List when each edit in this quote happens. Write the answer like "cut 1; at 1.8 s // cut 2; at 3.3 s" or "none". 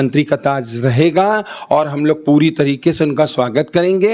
none